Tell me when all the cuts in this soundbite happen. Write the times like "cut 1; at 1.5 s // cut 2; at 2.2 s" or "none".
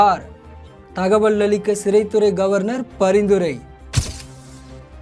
cut 1; at 4.1 s